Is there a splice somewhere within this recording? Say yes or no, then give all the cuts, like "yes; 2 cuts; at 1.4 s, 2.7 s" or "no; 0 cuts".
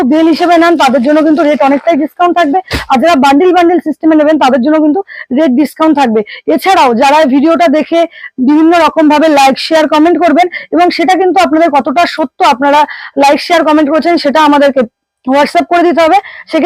no; 0 cuts